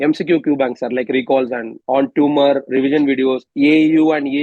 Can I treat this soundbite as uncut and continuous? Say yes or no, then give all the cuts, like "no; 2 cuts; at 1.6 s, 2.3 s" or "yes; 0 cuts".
no; 2 cuts; at 1.8 s, 3.5 s